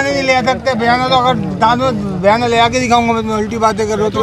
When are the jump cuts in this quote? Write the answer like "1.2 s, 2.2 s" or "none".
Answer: none